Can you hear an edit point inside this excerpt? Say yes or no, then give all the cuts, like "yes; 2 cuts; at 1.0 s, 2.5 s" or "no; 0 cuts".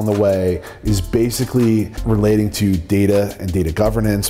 yes; 1 cut; at 1.9 s